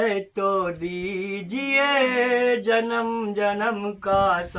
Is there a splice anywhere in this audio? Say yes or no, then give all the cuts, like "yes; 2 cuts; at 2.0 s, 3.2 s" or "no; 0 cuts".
no; 0 cuts